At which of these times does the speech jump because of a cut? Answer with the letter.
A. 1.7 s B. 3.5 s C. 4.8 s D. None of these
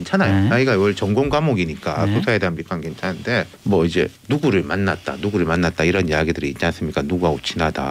B